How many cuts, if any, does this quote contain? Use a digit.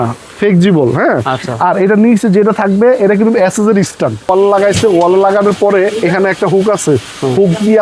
1